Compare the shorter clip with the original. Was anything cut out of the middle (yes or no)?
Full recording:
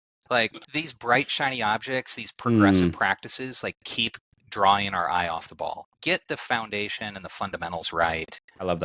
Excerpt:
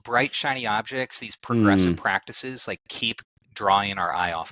no